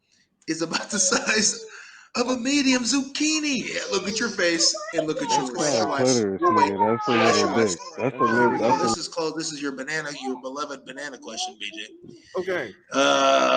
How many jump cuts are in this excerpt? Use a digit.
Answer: 3